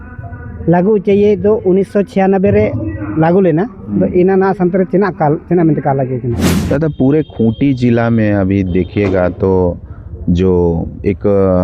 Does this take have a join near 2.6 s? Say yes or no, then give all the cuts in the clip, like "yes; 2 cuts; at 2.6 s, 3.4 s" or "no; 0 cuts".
no; 1 cut; at 6.5 s